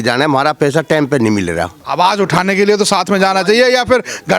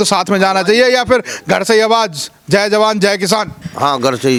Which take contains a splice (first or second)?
first